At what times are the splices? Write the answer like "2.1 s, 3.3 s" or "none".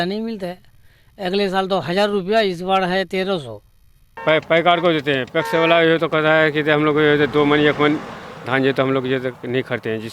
4.2 s